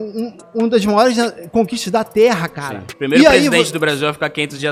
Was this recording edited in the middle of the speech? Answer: no; 0 cuts

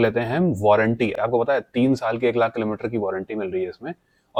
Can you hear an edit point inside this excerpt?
no; 0 cuts

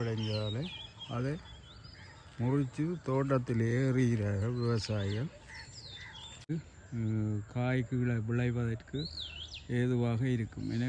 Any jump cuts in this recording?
yes; 1 cut; at 6.5 s

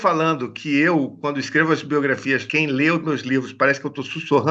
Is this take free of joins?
no; 1 cut; at 2.5 s

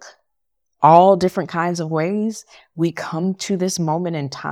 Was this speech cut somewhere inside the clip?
no; 0 cuts

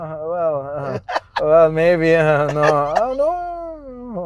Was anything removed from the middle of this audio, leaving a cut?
yes; 1 cut; at 1.3 s

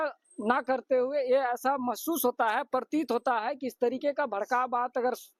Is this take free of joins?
yes; 0 cuts

